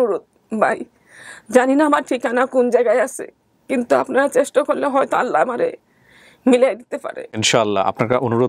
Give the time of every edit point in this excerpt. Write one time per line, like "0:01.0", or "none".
0:07.4